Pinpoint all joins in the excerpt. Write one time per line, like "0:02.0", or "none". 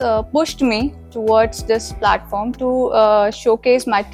none